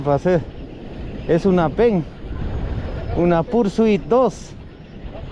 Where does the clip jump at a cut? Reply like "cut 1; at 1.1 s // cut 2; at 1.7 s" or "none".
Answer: none